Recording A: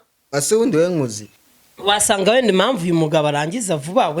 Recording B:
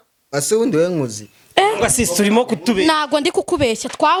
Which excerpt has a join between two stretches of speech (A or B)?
A